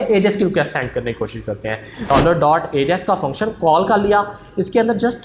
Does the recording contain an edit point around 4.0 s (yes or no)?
no